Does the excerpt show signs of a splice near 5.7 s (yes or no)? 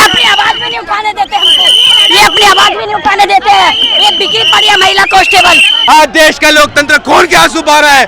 yes